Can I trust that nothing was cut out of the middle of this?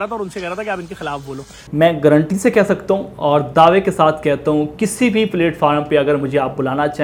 yes; 0 cuts

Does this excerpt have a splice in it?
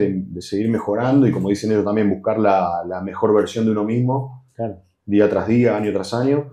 no; 0 cuts

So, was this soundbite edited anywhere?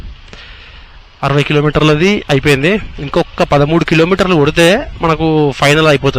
no; 0 cuts

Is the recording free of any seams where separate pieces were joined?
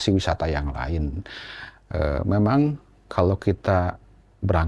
yes; 0 cuts

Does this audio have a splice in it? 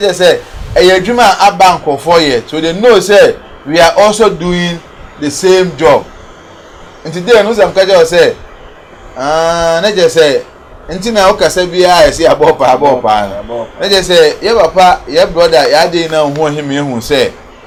no; 0 cuts

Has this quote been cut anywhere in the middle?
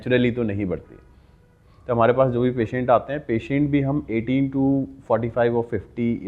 no; 0 cuts

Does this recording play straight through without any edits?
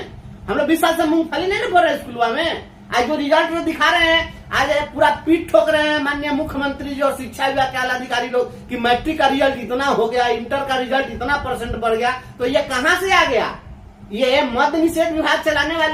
yes; 0 cuts

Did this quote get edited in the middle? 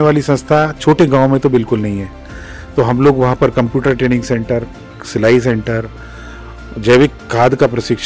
no; 0 cuts

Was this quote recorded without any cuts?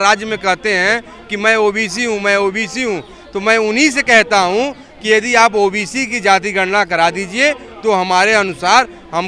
yes; 0 cuts

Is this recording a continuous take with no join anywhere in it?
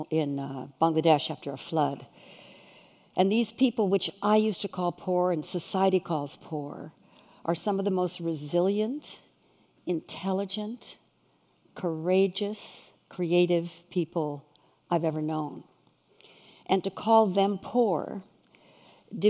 no; 1 cut; at 6.8 s

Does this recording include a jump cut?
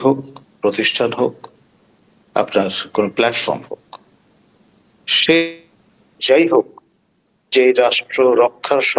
yes; 1 cut; at 6.2 s

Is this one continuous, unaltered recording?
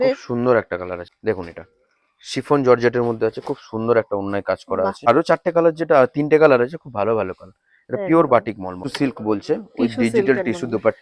no; 3 cuts; at 1.1 s, 5.0 s, 8.9 s

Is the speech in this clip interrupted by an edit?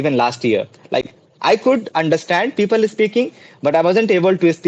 no; 0 cuts

